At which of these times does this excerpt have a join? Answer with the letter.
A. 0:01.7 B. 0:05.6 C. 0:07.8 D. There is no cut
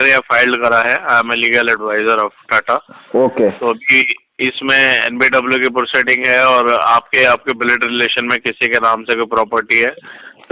D